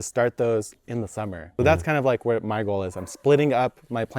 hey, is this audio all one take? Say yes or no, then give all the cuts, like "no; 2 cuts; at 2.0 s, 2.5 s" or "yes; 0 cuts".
no; 1 cut; at 1.4 s